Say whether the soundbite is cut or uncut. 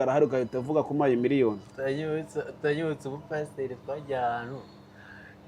uncut